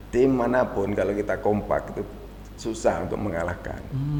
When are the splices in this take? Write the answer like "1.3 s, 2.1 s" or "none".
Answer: none